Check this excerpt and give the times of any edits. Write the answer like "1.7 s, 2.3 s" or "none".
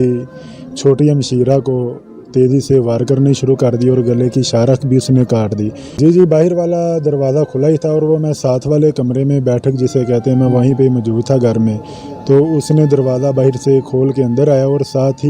5.8 s

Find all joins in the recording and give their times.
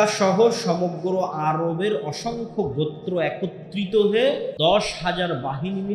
4.5 s

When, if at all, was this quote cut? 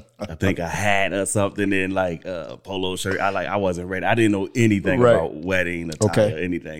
none

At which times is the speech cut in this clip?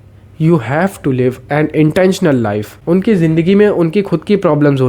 2.7 s

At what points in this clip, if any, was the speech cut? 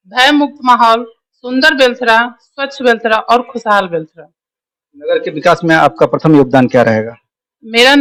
none

